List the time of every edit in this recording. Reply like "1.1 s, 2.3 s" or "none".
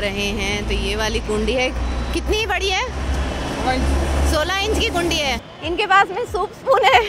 5.4 s